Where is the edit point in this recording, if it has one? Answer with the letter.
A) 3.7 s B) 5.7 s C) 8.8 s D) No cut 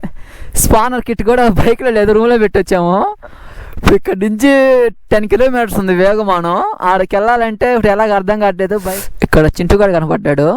C